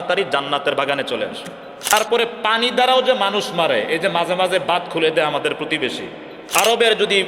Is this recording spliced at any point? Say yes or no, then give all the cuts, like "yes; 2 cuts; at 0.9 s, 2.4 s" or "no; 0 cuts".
yes; 2 cuts; at 1.9 s, 6.4 s